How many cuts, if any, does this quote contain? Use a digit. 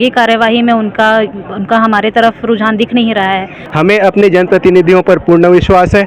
1